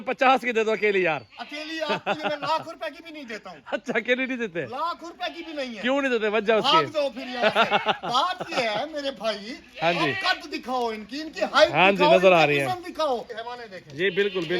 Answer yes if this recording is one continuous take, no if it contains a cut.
no